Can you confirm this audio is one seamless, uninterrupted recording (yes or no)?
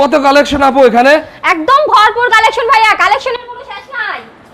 yes